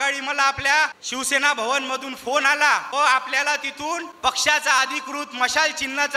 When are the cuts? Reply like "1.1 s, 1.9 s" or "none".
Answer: 1.0 s, 2.9 s, 4.1 s